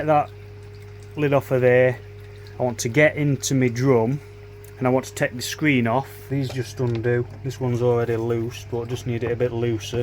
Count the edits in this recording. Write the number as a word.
one